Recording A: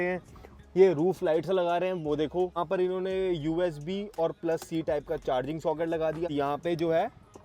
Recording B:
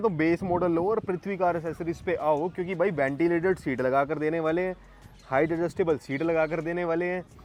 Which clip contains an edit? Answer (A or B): A